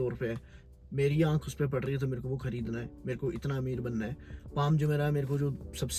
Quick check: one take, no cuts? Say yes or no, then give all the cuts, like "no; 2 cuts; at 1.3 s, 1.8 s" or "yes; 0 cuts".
yes; 0 cuts